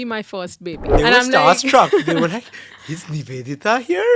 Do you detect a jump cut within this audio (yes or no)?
yes